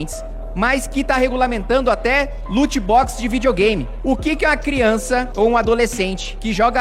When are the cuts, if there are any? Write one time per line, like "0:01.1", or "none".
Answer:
none

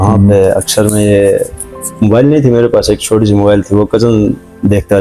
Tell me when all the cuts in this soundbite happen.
none

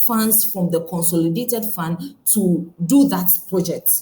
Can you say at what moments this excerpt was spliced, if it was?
0:02.7

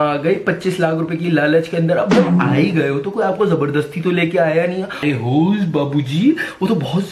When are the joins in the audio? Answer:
0:05.0

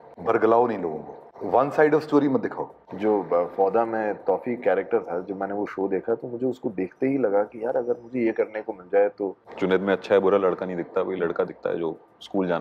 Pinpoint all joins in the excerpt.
0:02.8
0:09.4

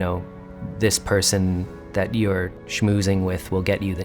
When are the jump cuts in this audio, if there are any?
0:02.6

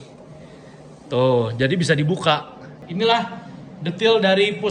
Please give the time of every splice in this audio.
0:02.8

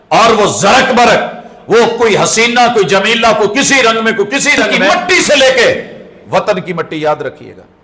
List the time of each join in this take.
0:04.9

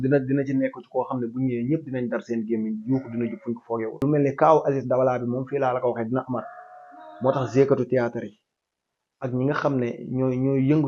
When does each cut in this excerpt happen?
0:04.0

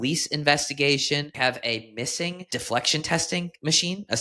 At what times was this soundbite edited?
0:01.3
0:02.5

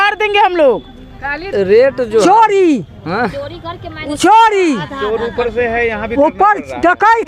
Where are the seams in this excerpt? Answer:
0:01.5

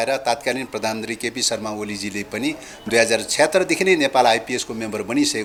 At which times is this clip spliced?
none

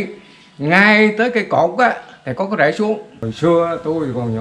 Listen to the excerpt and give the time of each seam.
0:03.2

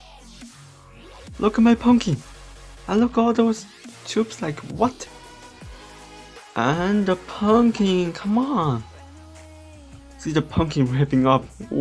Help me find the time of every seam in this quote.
0:05.1

